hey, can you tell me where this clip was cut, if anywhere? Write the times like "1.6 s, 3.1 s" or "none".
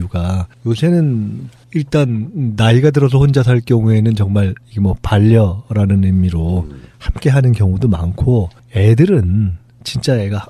none